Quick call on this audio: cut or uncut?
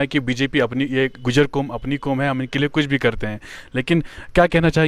uncut